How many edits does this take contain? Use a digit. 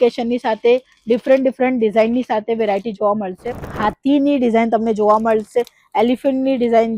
1